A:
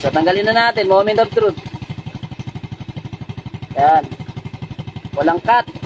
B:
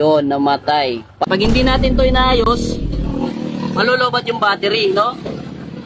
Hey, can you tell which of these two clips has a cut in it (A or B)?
B